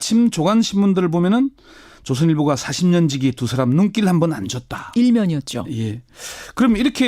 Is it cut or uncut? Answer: cut